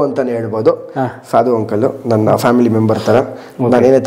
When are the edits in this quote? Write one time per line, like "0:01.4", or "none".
none